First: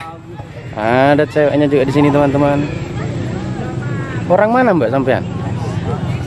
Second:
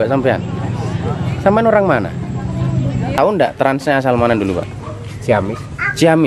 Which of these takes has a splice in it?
second; 1 cut; at 3.2 s

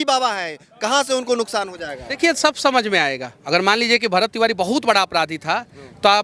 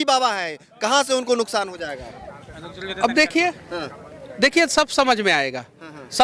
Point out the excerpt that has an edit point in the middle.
first; 2 cuts; at 2.2 s, 3.3 s

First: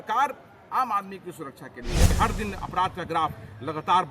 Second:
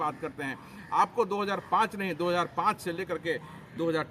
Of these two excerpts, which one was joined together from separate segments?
first; 1 cut; at 2.1 s

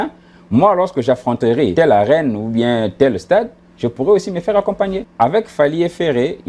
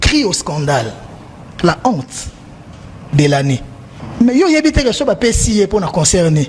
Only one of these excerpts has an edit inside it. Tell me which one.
first; 2 cuts; at 1.7 s, 5.0 s

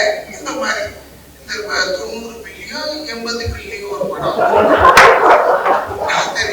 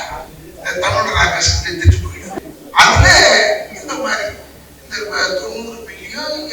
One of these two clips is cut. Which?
second; 1 cut; at 2.3 s

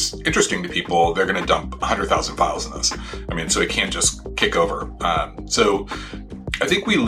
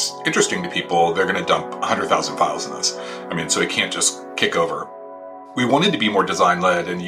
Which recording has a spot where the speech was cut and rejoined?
second; 1 cut; at 4.9 s

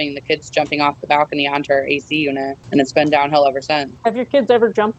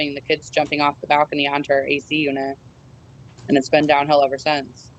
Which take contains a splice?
first; 2 cuts; at 2.6 s, 3.9 s

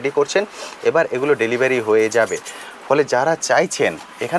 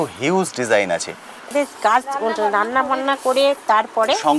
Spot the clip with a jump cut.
second; 1 cut; at 1.5 s

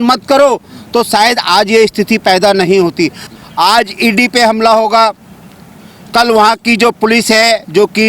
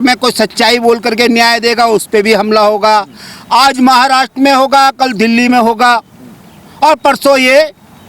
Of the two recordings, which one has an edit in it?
first; 1 cut; at 3.3 s

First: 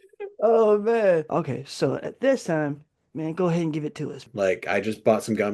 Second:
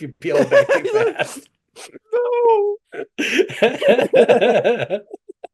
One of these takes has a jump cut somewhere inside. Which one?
first; 2 cuts; at 1.3 s, 4.3 s

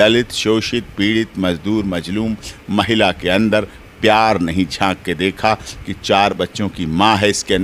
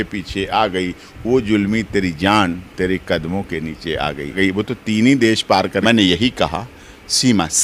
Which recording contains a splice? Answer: second; 2 cuts; at 4.4 s, 5.8 s

